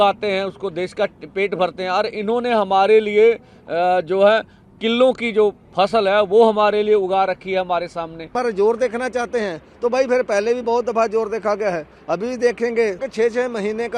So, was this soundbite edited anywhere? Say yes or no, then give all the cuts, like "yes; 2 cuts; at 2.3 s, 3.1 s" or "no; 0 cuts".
yes; 2 cuts; at 8.3 s, 13.1 s